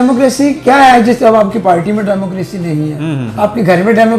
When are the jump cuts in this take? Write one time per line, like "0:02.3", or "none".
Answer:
none